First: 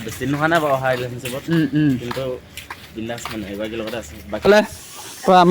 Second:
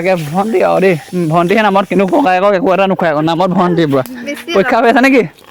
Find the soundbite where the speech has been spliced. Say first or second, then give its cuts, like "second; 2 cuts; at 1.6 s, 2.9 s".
first; 1 cut; at 4.5 s